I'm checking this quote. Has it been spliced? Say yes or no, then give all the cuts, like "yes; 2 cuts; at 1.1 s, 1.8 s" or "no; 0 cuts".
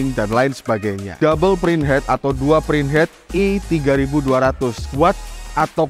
yes; 2 cuts; at 1.1 s, 4.8 s